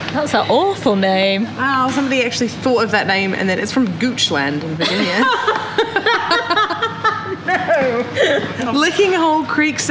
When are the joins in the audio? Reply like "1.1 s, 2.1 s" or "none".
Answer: none

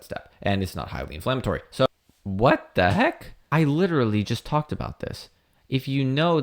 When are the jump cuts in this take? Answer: 1.9 s, 3.4 s

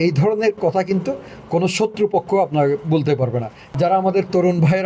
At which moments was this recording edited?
3.6 s

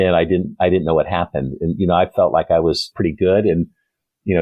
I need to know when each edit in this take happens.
2.9 s

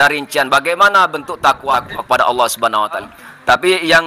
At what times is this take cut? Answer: 1.7 s, 3.1 s

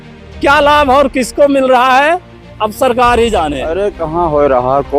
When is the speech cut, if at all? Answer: 4.0 s

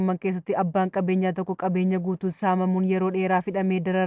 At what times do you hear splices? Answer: none

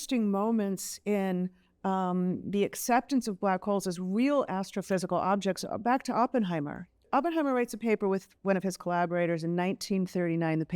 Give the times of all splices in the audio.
7.0 s

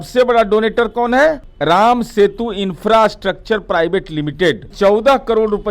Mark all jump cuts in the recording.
1.5 s, 4.7 s

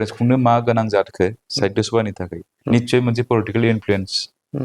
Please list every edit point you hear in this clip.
none

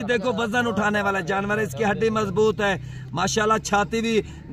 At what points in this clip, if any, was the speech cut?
none

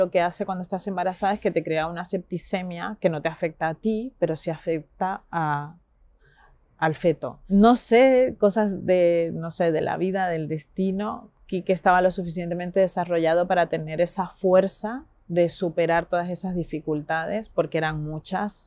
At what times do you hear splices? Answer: none

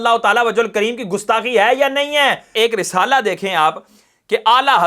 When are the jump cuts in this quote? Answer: 2.5 s

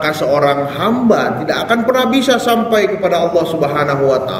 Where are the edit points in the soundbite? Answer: none

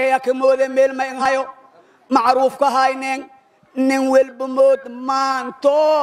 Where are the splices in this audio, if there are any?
1.2 s

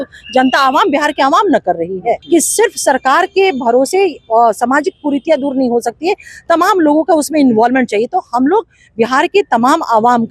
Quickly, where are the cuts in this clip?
2.2 s

